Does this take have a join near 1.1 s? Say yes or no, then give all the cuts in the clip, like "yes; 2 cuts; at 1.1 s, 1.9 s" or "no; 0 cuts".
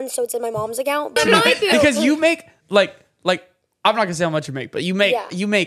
yes; 1 cut; at 1.1 s